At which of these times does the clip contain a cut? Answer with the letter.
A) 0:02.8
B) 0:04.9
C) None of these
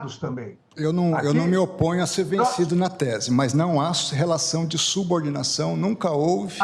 C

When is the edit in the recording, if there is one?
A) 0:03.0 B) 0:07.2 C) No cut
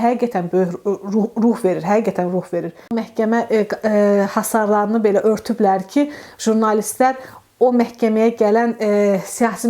A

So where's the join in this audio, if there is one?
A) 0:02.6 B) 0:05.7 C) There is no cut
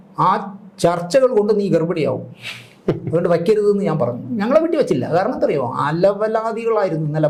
C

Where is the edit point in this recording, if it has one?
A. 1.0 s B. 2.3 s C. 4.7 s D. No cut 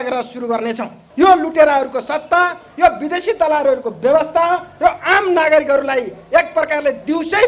A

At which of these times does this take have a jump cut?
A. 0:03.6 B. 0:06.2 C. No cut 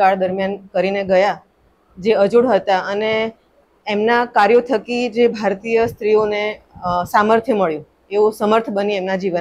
A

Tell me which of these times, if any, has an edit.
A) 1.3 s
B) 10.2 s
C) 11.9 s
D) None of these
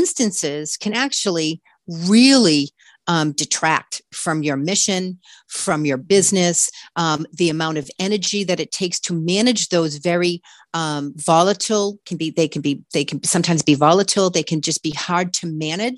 D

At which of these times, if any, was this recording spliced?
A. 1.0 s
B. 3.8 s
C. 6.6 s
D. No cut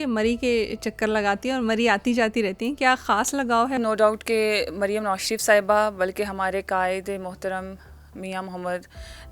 B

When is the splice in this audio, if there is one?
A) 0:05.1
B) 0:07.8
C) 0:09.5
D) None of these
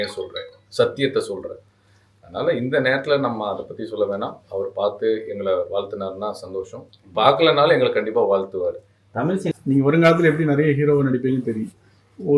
C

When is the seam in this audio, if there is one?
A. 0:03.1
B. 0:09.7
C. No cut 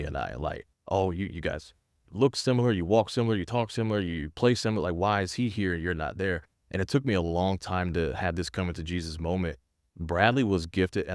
B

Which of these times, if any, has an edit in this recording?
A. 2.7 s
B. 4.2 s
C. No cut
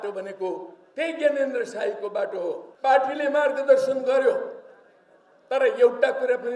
A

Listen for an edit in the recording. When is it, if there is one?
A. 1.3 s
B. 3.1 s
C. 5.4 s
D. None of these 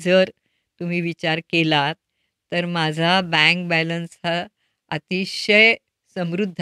D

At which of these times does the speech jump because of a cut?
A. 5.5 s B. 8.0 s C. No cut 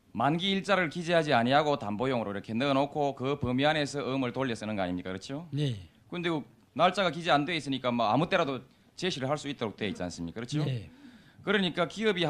A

